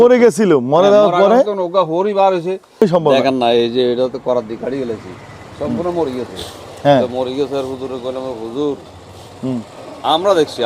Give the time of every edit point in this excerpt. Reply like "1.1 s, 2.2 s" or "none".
2.8 s